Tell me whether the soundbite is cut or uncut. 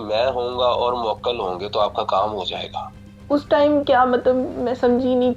uncut